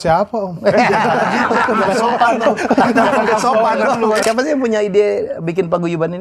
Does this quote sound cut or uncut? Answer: cut